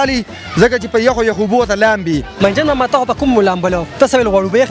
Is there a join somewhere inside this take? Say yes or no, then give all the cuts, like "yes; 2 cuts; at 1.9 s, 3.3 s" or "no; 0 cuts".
yes; 1 cut; at 2.3 s